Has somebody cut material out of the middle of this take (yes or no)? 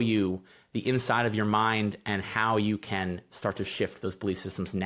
no